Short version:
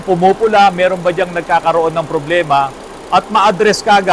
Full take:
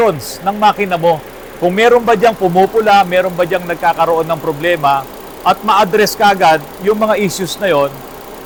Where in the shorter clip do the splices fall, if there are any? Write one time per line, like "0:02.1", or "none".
none

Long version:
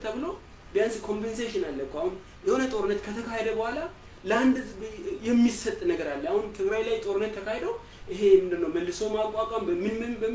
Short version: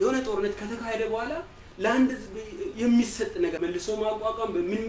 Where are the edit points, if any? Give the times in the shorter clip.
0:03.6

